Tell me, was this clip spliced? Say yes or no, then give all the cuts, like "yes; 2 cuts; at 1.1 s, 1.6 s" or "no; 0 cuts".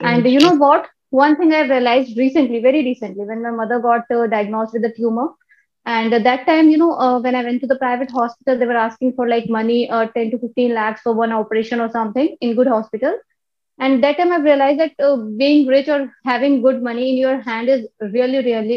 no; 0 cuts